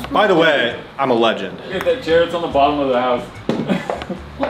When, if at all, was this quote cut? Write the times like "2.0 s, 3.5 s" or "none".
none